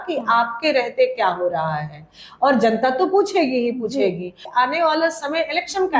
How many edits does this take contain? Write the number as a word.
one